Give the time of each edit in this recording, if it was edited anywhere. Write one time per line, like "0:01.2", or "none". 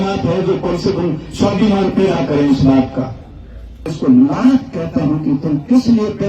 0:03.9